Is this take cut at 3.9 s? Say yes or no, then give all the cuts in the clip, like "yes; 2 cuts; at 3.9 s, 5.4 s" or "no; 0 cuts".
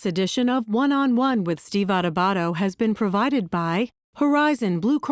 no; 0 cuts